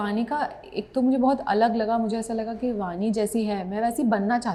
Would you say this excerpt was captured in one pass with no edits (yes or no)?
yes